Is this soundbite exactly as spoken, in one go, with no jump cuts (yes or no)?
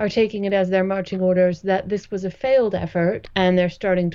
no